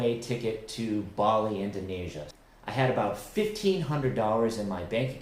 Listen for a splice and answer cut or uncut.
cut